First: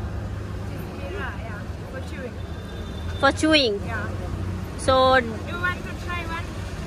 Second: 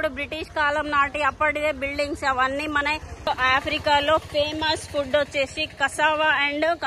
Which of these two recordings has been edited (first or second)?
second